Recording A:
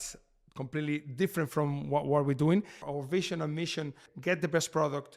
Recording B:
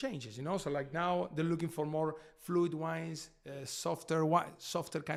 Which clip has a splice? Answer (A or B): A